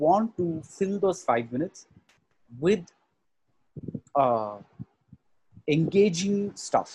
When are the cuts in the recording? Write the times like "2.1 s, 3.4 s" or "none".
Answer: none

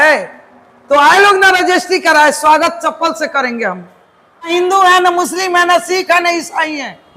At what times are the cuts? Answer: 4.5 s

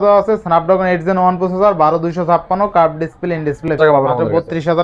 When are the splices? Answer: 3.8 s

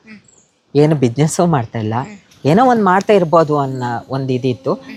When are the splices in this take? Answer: none

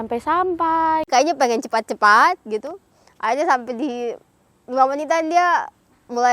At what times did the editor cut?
1.1 s

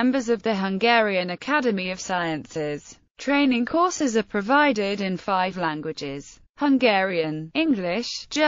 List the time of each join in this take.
3.7 s

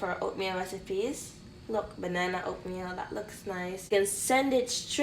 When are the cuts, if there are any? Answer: 3.9 s

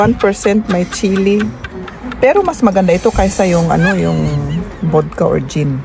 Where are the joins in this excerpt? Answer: 1.9 s

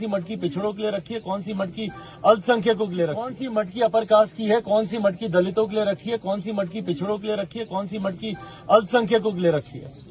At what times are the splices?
3.4 s

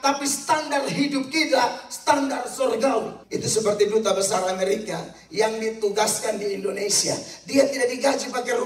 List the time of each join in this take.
3.2 s

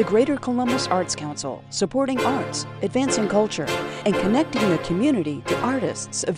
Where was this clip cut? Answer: none

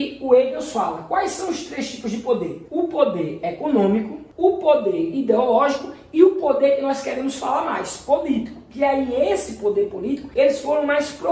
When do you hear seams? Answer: 10.2 s

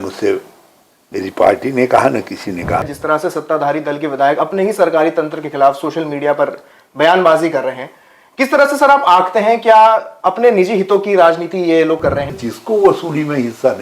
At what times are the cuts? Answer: 2.8 s, 12.3 s

